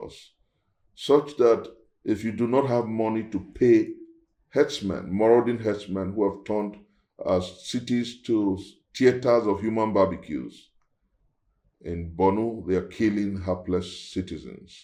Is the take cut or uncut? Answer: uncut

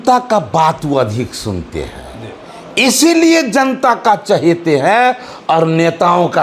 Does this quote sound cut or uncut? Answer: uncut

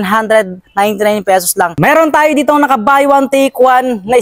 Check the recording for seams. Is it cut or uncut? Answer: cut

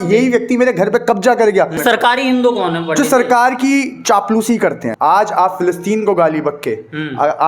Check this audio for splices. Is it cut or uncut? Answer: cut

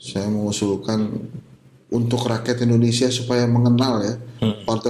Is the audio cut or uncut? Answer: uncut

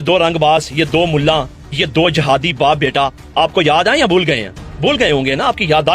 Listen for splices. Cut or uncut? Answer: uncut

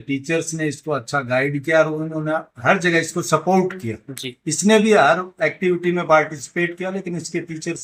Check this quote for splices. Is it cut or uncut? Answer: uncut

